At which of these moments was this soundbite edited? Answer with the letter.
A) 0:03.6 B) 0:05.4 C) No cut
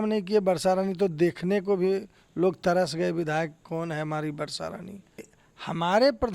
B